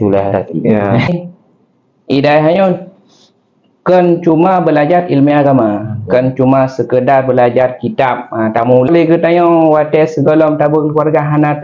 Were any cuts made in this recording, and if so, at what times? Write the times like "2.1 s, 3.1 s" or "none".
1.1 s, 8.9 s